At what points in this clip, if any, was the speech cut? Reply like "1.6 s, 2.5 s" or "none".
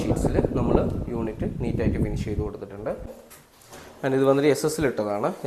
3.2 s